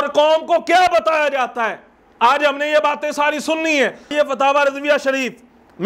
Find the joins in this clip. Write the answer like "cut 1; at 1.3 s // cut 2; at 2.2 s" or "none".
cut 1; at 4.1 s